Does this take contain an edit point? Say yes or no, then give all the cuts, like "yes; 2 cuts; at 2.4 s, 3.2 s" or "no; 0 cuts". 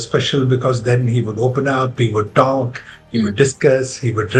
no; 0 cuts